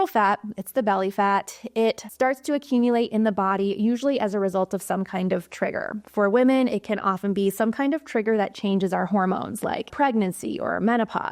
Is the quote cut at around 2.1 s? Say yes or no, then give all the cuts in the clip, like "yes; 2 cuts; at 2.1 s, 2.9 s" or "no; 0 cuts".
yes; 2 cuts; at 2.1 s, 9.9 s